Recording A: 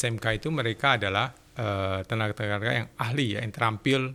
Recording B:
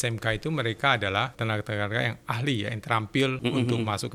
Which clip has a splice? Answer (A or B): B